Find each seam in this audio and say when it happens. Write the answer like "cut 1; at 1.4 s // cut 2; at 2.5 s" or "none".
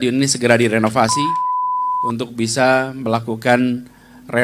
cut 1; at 1.8 s